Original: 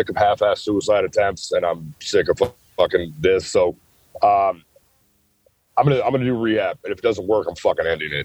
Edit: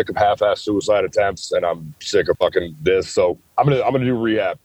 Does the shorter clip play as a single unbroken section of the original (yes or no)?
no